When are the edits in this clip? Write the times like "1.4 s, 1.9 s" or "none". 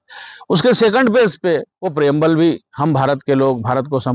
1.7 s